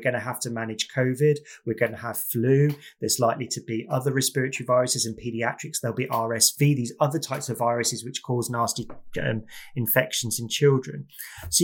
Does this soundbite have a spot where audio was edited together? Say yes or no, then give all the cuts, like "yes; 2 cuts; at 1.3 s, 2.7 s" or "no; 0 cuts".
no; 0 cuts